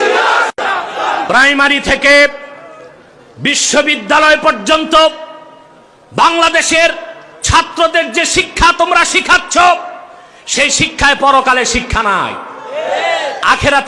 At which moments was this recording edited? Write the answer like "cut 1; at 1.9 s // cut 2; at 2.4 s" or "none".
cut 1; at 1.2 s